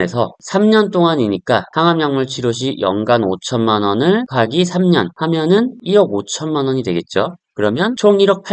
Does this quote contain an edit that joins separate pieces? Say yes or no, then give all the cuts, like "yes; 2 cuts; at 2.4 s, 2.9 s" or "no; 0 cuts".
no; 0 cuts